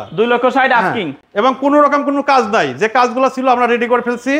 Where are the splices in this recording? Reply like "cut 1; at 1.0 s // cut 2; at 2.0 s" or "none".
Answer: none